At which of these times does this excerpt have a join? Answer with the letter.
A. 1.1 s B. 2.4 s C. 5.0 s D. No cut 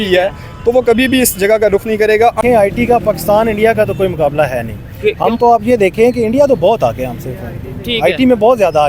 B